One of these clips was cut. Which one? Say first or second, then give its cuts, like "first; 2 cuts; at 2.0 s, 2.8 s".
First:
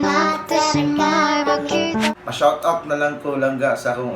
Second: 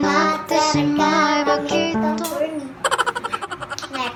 first; 1 cut; at 2.2 s